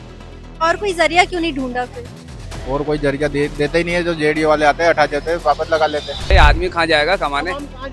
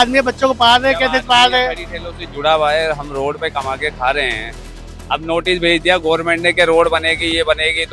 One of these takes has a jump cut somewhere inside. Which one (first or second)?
first